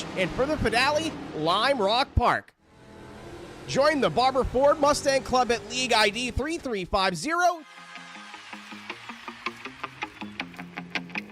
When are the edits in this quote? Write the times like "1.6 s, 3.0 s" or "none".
7.6 s